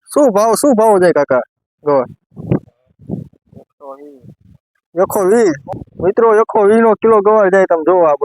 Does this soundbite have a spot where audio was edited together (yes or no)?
yes